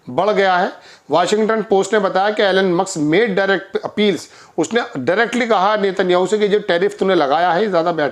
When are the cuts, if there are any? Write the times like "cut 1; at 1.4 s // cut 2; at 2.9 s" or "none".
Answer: none